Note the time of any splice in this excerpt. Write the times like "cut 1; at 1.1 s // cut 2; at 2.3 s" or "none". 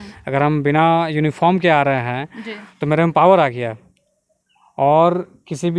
none

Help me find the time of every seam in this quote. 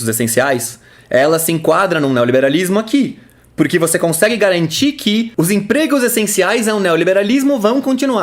cut 1; at 5.3 s

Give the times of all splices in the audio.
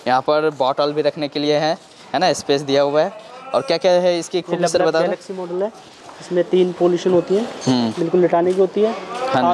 none

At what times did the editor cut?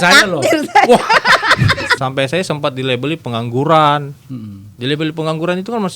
cut 1; at 2.0 s

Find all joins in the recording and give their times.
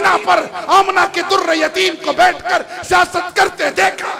none

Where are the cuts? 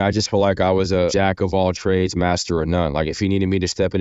cut 1; at 1.1 s

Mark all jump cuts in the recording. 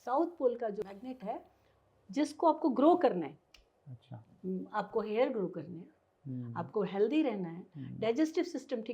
cut 1; at 0.9 s

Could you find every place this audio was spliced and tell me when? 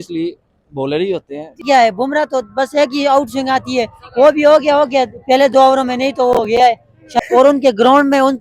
cut 1; at 1.6 s // cut 2; at 7.2 s

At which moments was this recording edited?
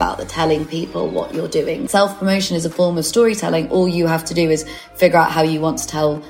cut 1; at 1.9 s

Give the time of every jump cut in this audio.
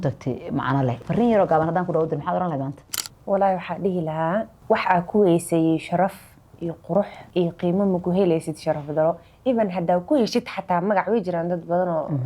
cut 1; at 1.0 s // cut 2; at 4.5 s // cut 3; at 7.2 s

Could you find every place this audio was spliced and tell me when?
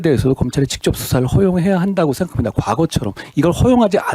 none

